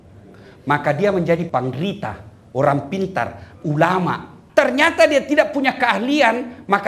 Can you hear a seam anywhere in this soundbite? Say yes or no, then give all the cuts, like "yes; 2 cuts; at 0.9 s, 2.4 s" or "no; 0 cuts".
yes; 2 cuts; at 1.4 s, 4.4 s